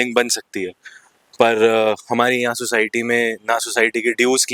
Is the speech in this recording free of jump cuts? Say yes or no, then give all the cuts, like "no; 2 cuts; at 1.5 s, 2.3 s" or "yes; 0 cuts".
yes; 0 cuts